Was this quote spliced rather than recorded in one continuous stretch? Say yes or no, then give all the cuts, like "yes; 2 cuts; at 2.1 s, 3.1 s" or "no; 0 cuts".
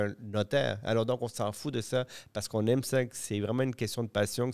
no; 0 cuts